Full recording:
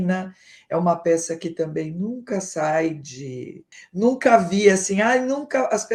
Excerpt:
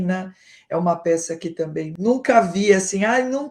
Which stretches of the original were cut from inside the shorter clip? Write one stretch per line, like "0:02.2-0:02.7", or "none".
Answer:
0:01.9-0:03.9